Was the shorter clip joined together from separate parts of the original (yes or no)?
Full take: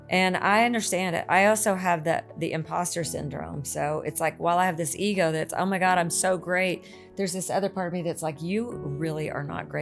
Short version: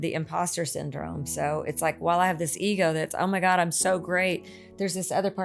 no